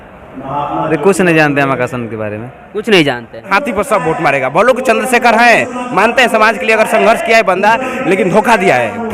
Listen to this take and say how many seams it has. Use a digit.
1